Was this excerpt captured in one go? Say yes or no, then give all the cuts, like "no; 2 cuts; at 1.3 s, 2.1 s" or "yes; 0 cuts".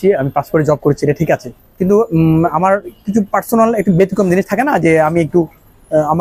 yes; 0 cuts